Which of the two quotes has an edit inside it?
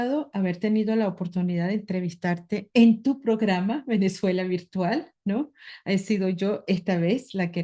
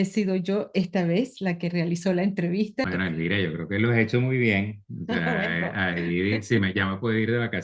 second; 1 cut; at 2.9 s

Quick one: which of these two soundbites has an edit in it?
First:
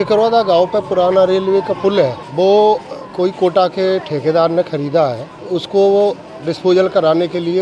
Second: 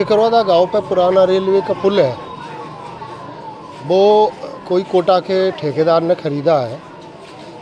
first; 2 cuts; at 2.2 s, 5.3 s

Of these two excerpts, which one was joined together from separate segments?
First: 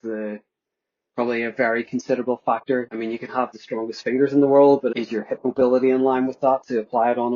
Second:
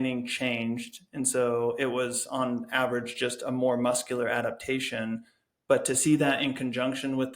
first; 2 cuts; at 2.9 s, 4.9 s

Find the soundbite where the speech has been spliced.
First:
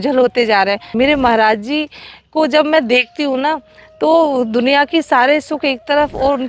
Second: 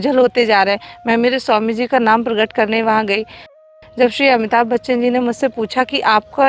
first; 1 cut; at 0.9 s

